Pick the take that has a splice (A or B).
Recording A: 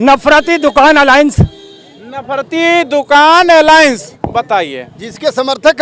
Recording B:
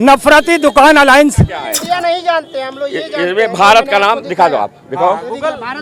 B